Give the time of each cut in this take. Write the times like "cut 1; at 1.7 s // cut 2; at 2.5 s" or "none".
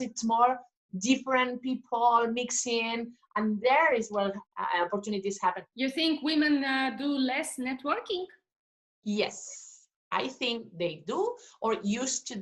cut 1; at 5.6 s